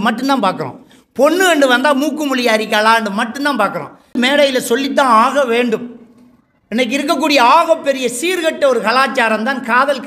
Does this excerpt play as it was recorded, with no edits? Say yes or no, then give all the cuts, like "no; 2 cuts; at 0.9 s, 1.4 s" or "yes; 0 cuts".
no; 1 cut; at 4.2 s